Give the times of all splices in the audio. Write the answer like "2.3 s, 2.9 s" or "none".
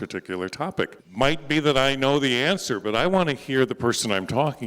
1.0 s